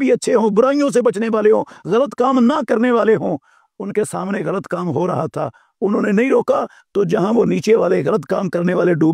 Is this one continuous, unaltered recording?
yes; 0 cuts

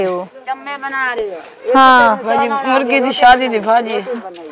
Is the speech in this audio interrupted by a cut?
no; 0 cuts

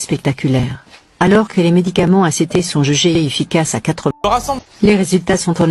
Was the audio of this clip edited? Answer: yes; 1 cut; at 4.3 s

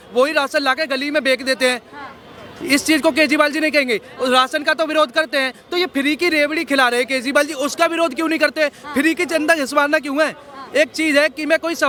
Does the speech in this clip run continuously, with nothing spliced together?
yes; 0 cuts

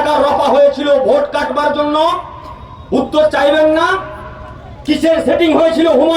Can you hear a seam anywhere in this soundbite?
no; 0 cuts

